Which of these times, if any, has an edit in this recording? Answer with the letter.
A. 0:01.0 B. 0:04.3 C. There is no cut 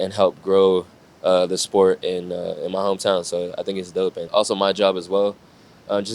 B